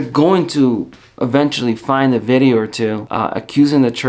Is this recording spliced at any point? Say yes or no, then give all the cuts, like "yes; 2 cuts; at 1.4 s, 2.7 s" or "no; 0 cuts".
yes; 1 cut; at 3.1 s